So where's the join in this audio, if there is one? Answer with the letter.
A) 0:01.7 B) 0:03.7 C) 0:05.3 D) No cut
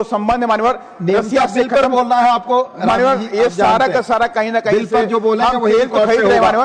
D